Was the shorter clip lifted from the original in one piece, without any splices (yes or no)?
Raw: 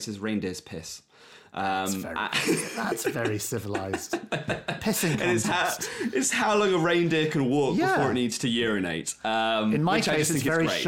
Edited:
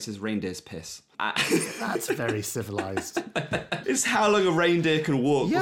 no